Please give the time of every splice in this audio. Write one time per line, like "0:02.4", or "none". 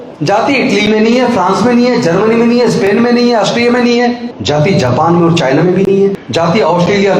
0:04.3
0:06.2